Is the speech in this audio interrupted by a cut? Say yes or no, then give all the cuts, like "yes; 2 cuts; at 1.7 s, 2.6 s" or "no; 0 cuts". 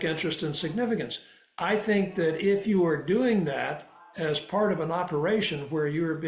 no; 0 cuts